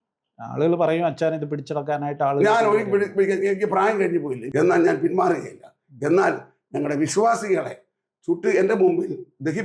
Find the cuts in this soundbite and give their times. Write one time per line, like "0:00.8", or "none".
0:04.7